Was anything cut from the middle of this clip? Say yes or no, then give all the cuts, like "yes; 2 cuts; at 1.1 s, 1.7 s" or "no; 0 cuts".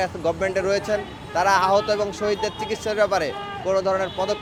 no; 0 cuts